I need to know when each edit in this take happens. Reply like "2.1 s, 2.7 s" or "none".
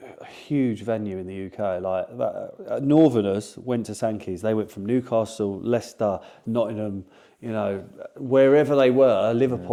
none